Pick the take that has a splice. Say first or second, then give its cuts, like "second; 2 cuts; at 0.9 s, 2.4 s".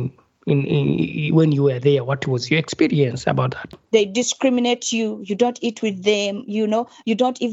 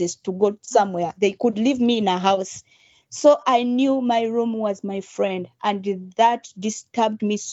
first; 1 cut; at 3.8 s